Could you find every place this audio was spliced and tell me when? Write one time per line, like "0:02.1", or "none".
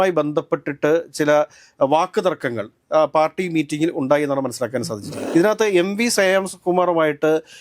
0:05.2